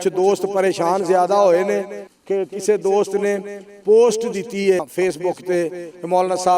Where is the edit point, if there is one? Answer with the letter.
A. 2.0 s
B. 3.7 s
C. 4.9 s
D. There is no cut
C